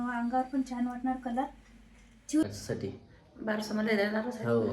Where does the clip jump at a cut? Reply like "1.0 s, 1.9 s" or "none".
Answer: 2.4 s